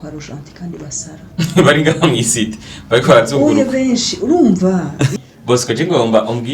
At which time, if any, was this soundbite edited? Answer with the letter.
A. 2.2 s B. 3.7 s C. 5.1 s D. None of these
C